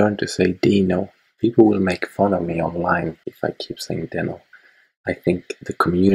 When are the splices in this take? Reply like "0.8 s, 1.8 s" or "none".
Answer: 1.2 s, 3.2 s